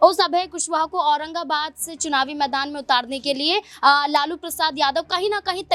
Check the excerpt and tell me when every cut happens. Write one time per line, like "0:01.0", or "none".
none